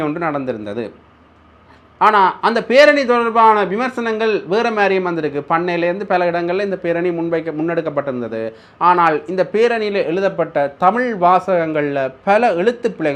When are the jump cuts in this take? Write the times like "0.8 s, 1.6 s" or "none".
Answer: none